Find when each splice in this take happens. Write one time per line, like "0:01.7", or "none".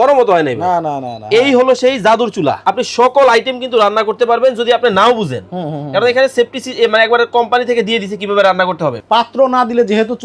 0:02.6
0:09.0